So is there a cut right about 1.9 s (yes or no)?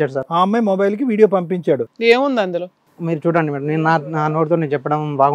yes